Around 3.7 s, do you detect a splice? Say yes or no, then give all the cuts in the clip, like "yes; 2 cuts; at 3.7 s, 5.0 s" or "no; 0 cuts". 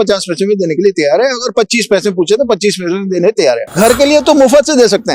yes; 1 cut; at 3.7 s